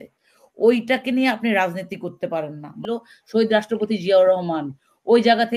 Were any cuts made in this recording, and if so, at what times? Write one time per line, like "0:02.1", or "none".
0:02.8